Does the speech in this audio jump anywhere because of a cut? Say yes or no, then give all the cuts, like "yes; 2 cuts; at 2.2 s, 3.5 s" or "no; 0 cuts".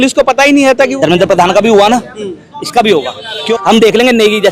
yes; 2 cuts; at 0.9 s, 3.5 s